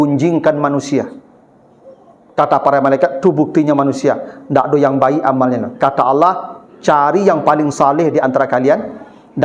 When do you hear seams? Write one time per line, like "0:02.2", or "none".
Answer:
none